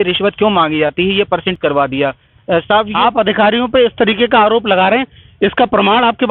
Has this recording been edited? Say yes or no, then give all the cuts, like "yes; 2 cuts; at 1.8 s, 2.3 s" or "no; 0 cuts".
yes; 1 cut; at 1.5 s